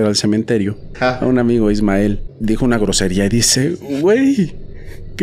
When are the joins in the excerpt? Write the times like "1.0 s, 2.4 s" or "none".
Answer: 0.9 s, 2.3 s